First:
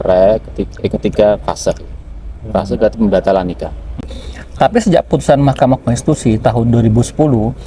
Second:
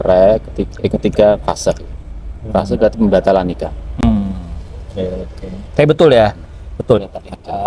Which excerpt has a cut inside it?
first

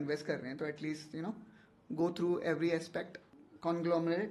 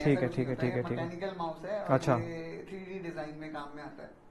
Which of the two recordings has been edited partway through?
first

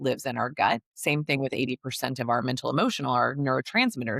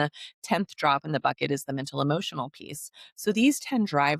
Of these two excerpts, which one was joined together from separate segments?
first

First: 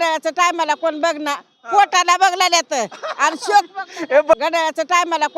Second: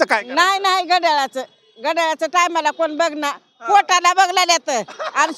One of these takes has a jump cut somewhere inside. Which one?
first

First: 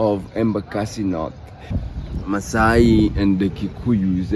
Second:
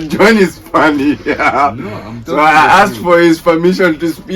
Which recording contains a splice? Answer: first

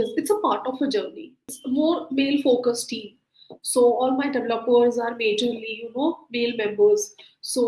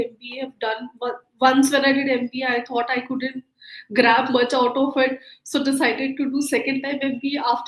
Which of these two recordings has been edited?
first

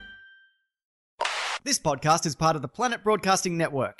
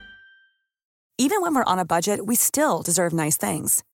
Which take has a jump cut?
first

